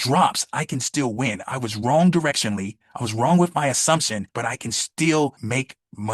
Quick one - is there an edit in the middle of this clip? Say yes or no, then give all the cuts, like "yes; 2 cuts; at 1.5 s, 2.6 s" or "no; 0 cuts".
yes; 2 cuts; at 4.2 s, 5.4 s